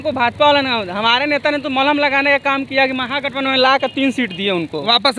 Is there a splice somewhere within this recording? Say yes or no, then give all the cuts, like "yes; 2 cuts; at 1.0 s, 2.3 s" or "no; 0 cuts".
no; 0 cuts